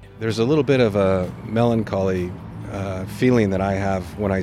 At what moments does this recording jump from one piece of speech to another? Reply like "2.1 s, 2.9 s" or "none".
none